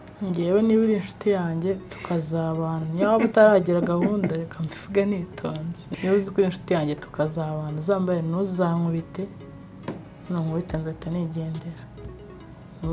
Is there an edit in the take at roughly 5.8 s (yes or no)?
yes